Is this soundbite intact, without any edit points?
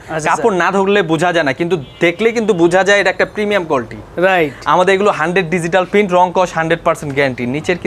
yes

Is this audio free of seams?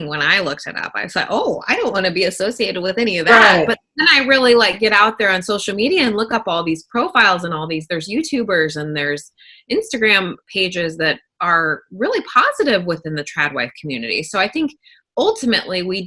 yes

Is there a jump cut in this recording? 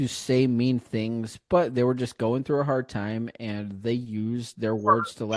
no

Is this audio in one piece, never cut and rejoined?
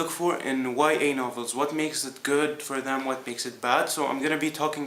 yes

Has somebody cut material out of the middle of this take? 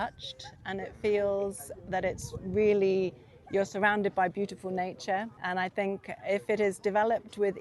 yes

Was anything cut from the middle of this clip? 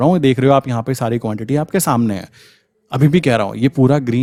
no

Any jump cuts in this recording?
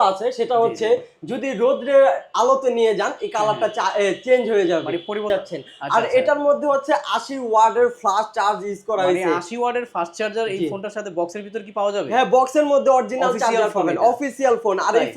yes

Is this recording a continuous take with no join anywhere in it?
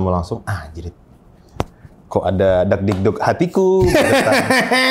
yes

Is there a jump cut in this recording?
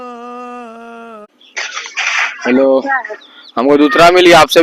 yes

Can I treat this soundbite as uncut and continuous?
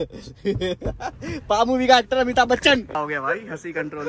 no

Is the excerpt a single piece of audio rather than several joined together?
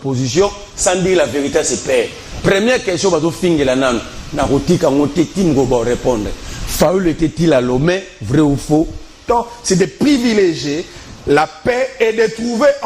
no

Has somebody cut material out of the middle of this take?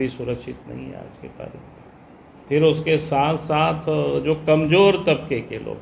yes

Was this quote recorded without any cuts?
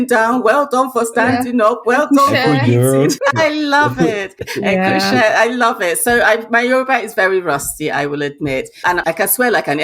no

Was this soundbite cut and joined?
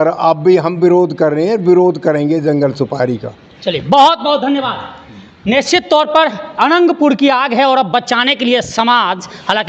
no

